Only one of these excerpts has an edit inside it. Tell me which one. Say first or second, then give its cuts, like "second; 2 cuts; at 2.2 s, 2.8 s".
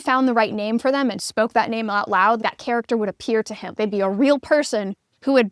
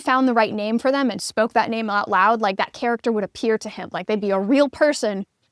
first; 2 cuts; at 2.4 s, 3.6 s